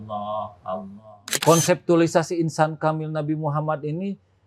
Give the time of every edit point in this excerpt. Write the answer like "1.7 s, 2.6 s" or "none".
1.3 s